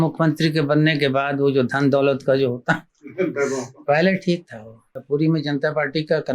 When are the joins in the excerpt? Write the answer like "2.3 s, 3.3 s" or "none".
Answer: 5.0 s